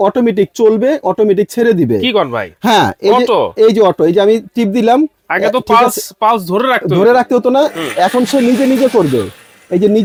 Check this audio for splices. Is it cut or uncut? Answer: uncut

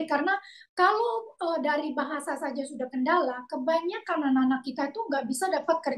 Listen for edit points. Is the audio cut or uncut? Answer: uncut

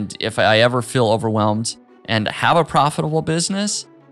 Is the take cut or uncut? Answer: uncut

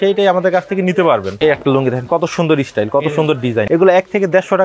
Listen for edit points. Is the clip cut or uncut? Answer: cut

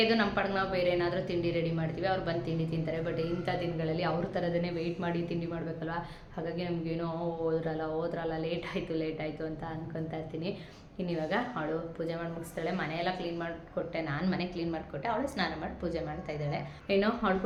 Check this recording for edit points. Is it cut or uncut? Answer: uncut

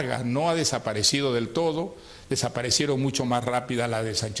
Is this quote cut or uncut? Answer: cut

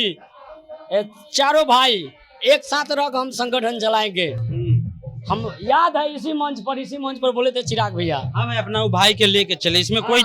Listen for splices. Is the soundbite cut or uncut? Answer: uncut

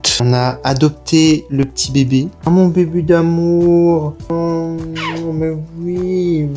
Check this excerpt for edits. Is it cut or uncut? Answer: uncut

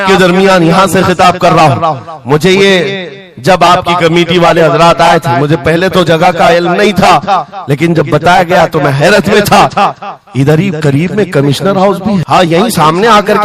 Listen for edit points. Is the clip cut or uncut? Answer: cut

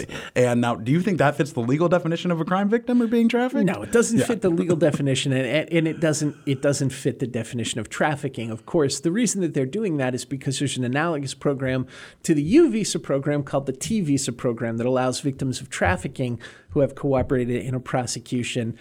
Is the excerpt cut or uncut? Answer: uncut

